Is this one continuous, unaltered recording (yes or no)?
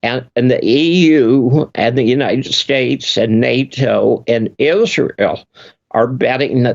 yes